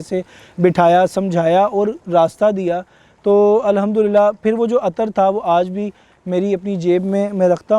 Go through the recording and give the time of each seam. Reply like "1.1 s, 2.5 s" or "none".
none